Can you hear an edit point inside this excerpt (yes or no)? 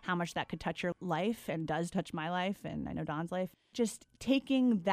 yes